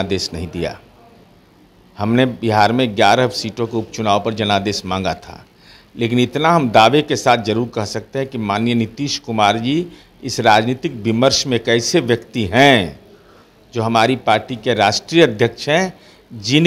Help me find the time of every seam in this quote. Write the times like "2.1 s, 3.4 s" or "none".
none